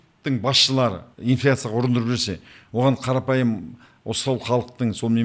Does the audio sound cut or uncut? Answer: cut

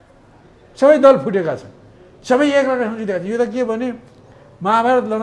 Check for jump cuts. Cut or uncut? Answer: uncut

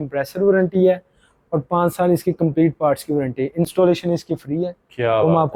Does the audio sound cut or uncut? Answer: uncut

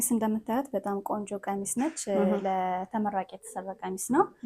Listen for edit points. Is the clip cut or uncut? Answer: uncut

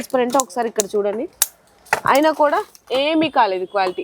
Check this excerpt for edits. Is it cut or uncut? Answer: uncut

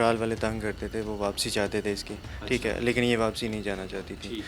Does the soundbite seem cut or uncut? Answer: uncut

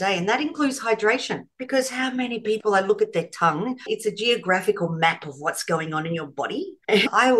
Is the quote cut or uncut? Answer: cut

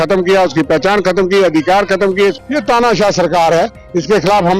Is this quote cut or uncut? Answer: cut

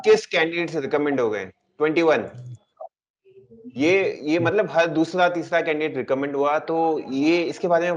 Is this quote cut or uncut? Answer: uncut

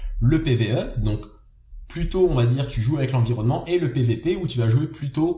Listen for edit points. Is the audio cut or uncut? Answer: cut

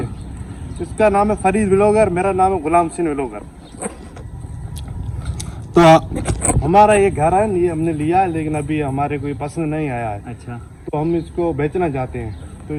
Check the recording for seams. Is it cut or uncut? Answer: uncut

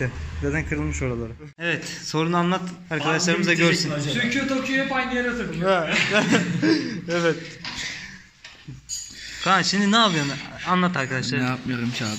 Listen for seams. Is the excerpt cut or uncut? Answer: cut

